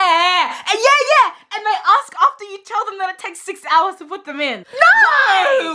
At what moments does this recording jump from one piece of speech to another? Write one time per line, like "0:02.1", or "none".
0:04.6